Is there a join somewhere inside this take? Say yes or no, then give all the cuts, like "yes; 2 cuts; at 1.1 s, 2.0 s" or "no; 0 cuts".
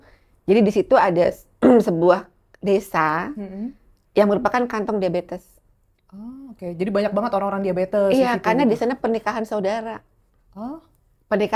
no; 0 cuts